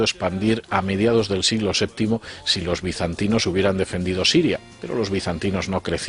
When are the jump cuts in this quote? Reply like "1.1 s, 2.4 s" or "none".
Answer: 0.9 s